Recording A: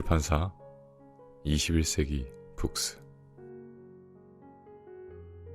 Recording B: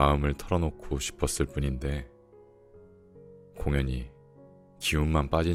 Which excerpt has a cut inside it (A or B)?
A